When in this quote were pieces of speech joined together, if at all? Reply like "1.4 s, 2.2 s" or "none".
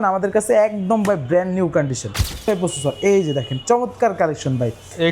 2.5 s